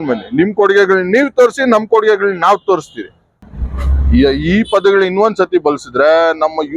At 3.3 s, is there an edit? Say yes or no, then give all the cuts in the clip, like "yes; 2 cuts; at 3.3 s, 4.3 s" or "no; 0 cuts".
yes; 1 cut; at 3.3 s